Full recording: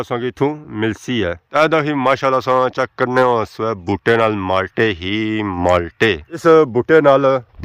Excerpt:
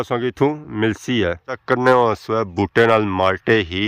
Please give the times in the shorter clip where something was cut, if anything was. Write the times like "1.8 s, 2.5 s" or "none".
1.5 s